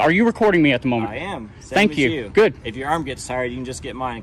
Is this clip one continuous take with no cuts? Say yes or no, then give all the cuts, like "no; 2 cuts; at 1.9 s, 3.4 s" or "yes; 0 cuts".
yes; 0 cuts